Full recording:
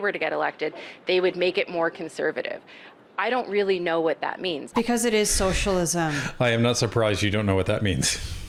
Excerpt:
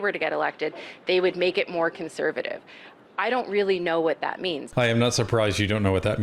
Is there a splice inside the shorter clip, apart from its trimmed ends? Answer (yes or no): yes